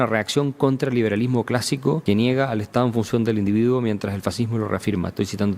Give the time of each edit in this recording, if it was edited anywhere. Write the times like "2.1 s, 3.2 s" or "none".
2.0 s